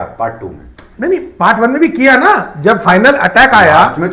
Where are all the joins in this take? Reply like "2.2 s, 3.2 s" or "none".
none